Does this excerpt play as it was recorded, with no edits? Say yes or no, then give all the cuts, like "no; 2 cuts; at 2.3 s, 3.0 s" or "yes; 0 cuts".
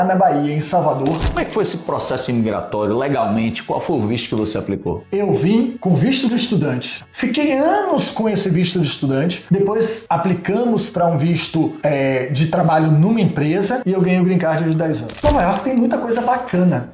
no; 5 cuts; at 1.3 s, 5.0 s, 7.0 s, 13.8 s, 15.1 s